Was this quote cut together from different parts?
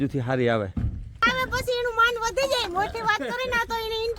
yes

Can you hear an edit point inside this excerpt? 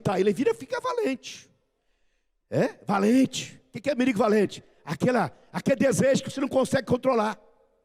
no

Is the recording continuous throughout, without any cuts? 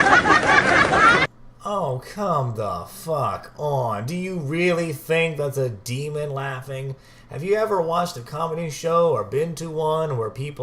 no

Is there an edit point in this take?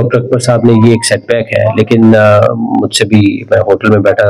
no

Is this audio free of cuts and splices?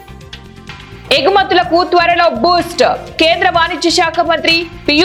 yes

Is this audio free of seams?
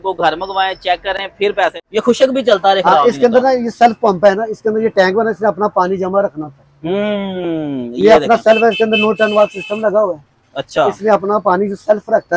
no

